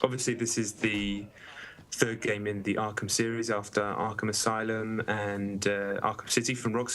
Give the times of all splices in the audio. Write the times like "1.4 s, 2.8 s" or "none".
1.9 s